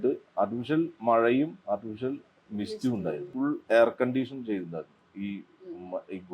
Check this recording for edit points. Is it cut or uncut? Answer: cut